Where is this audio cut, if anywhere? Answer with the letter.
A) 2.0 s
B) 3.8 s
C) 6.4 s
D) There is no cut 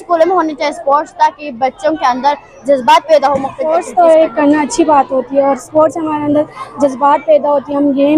B